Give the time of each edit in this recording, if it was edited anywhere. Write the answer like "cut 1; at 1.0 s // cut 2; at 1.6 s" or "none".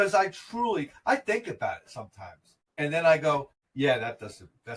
cut 1; at 3.6 s